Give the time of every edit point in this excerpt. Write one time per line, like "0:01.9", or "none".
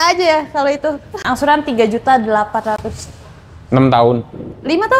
0:01.2

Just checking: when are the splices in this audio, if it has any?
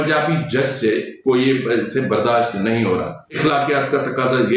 0:03.4

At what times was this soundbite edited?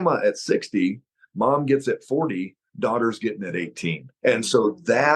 0:04.1

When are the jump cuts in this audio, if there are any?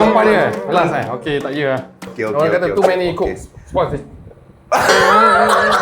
0:02.2

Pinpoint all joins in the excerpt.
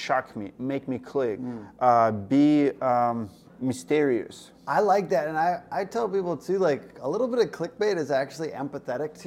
none

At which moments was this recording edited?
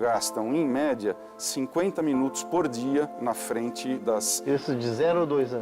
0:04.0

